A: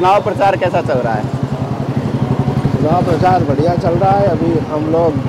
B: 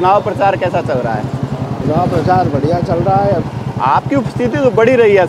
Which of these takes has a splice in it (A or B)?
B